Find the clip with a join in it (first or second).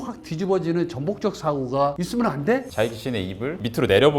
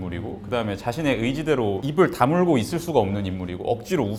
first